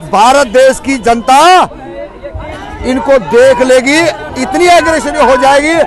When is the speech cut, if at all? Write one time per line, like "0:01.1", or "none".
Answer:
none

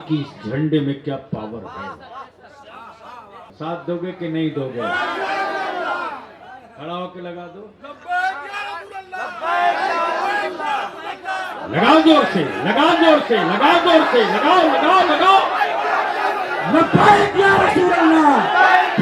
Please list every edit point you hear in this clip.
0:03.5

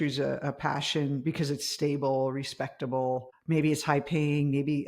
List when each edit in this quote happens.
0:03.3

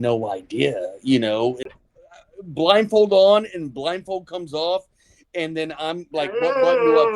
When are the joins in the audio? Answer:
0:01.6

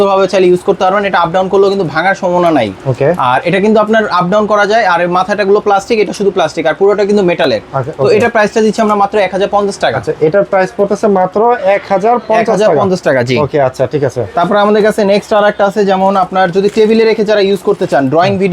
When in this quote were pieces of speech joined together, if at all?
none

